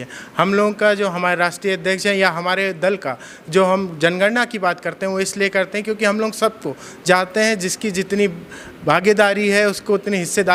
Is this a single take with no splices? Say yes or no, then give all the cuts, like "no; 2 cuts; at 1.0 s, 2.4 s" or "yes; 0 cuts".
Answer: yes; 0 cuts